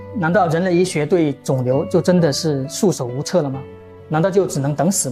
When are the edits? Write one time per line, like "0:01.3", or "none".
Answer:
none